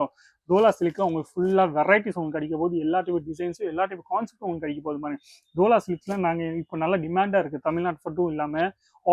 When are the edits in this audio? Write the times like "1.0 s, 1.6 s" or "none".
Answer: none